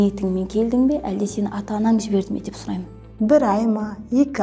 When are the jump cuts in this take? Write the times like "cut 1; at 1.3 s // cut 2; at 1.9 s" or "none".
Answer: cut 1; at 3.0 s